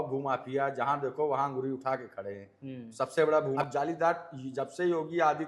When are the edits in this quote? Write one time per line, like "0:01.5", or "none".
0:03.6